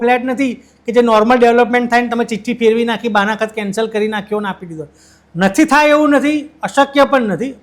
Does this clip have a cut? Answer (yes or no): no